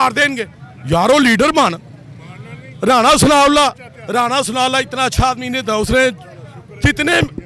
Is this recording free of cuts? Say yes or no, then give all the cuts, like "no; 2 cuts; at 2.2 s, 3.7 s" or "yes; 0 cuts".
yes; 0 cuts